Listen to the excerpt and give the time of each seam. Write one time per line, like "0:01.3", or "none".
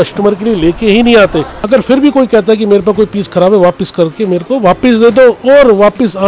0:01.5